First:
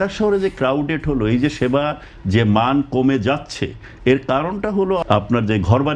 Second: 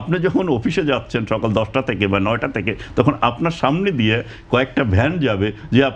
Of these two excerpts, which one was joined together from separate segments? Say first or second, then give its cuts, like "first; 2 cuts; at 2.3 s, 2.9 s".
first; 1 cut; at 5.0 s